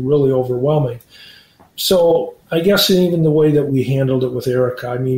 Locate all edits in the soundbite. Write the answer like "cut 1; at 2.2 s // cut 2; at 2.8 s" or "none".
cut 1; at 3.7 s